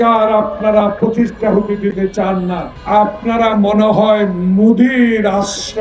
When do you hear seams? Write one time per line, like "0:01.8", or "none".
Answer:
0:02.7